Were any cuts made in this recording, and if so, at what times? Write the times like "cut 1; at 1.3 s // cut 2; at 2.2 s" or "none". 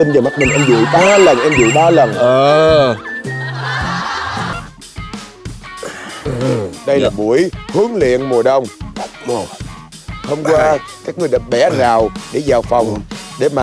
cut 1; at 4.5 s